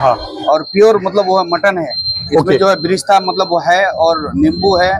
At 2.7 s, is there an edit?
no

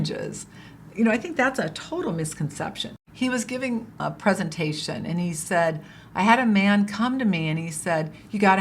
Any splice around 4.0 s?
yes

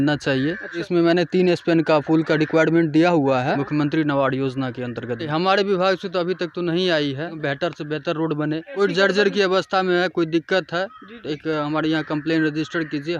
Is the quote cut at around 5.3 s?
yes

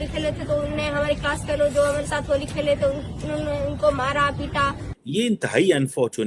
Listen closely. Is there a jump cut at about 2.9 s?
no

